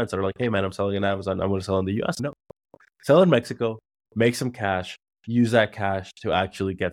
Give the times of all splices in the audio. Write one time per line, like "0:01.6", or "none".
0:02.2